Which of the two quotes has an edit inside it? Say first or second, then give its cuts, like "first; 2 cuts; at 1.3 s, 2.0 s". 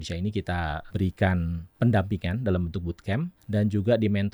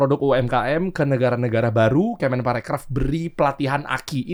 first; 3 cuts; at 0.8 s, 1.6 s, 3.4 s